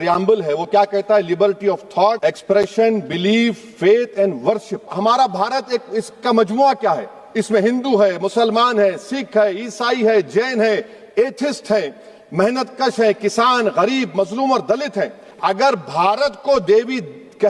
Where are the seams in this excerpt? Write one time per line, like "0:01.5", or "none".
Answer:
0:02.2
0:04.9
0:15.2